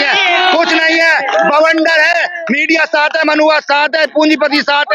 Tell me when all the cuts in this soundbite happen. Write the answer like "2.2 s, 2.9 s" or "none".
none